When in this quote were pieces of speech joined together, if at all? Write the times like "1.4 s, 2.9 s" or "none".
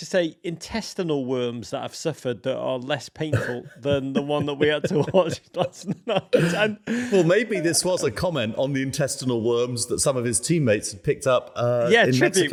none